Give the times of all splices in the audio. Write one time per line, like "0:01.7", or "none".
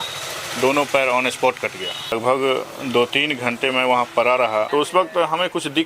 0:02.1
0:04.7